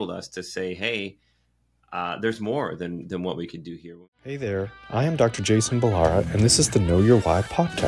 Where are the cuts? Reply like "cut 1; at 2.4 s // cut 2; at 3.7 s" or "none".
cut 1; at 3.9 s